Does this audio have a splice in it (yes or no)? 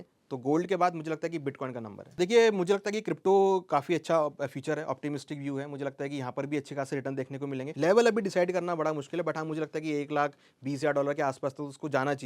yes